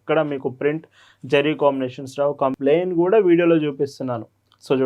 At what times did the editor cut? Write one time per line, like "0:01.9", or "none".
0:02.6